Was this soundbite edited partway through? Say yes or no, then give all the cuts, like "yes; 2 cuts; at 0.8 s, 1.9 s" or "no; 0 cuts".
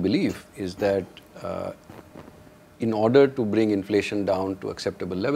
no; 0 cuts